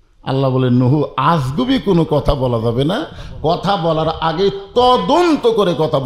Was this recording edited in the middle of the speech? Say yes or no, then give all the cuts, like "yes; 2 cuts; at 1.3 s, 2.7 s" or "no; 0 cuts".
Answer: no; 0 cuts